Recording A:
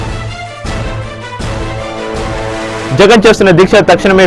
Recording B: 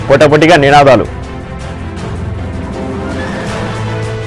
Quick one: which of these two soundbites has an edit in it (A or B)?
A